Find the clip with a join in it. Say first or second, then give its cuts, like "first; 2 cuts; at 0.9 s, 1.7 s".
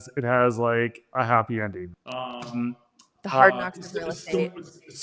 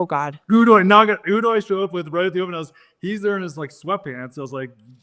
first; 1 cut; at 1.8 s